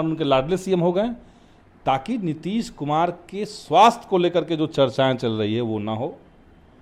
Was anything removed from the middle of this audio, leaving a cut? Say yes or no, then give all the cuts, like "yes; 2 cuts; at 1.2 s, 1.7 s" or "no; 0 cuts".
no; 0 cuts